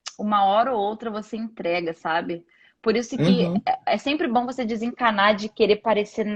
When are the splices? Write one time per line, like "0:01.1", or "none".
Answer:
none